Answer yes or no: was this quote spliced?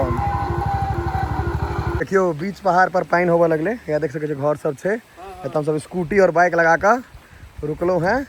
yes